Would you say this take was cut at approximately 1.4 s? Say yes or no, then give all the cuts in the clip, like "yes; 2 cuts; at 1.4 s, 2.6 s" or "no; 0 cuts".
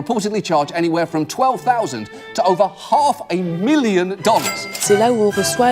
no; 1 cut; at 4.7 s